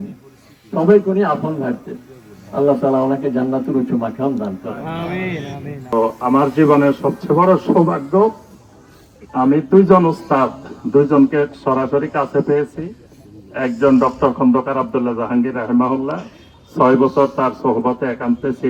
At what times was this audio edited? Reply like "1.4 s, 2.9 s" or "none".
none